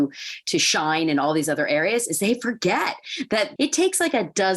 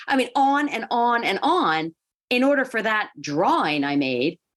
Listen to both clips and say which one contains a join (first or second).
first